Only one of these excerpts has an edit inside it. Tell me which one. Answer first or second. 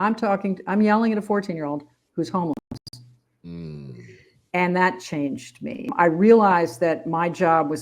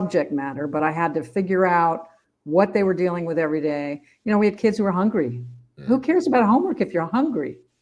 first